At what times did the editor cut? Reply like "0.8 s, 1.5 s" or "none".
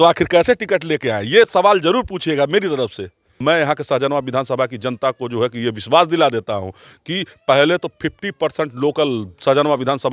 3.4 s